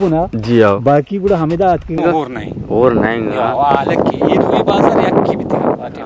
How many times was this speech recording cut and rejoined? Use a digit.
1